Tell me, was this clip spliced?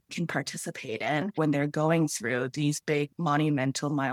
yes; 2 cuts; at 1.3 s, 3.1 s

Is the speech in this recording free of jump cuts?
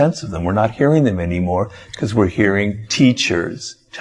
no; 1 cut; at 2.8 s

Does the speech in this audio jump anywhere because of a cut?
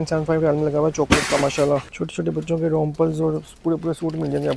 yes; 1 cut; at 2.0 s

